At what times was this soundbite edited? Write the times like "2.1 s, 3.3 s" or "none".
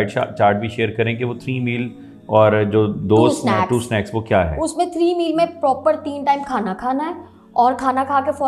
none

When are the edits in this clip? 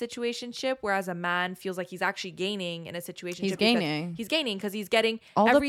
none

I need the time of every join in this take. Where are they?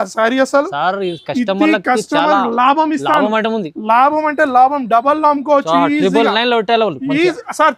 none

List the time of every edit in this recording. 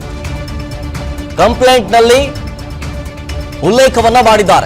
3.2 s

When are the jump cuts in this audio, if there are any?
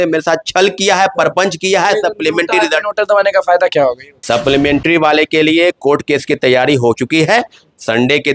4.2 s

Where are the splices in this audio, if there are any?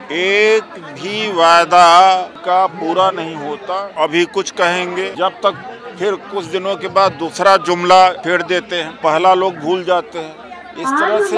2.4 s, 3.9 s, 5.1 s, 8.4 s

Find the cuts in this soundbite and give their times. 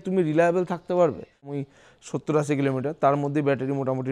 1.5 s

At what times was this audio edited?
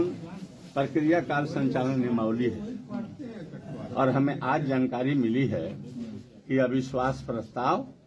none

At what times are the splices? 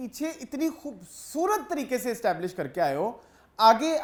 none

